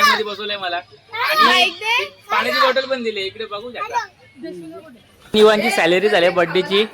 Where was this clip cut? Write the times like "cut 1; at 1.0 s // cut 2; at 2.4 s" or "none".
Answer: cut 1; at 5.3 s